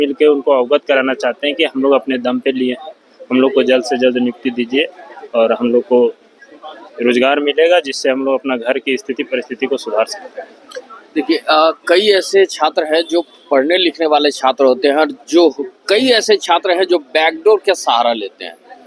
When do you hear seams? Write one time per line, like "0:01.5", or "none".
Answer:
none